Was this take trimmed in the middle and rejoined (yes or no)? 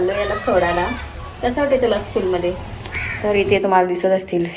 yes